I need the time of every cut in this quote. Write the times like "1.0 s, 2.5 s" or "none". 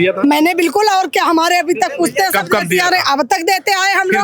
none

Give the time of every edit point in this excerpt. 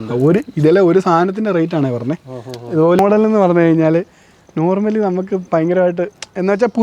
3.0 s

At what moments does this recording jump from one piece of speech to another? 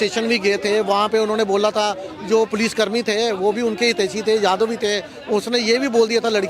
none

